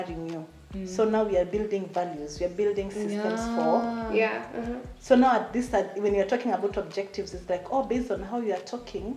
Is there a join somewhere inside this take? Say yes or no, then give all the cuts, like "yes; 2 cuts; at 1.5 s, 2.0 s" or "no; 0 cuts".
no; 0 cuts